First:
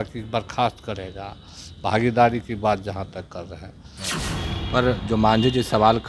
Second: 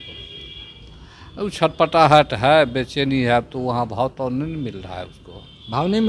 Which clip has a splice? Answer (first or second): first